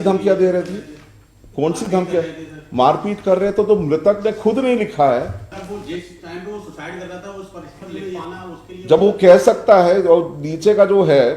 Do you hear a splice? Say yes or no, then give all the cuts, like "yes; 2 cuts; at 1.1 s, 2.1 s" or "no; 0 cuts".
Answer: yes; 2 cuts; at 5.4 s, 8.2 s